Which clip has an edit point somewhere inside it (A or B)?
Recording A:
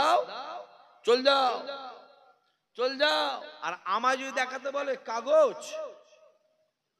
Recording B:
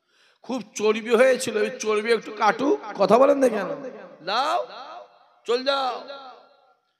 A